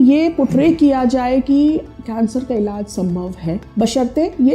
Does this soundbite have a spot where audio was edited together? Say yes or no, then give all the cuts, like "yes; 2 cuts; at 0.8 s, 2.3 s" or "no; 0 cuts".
yes; 1 cut; at 3.6 s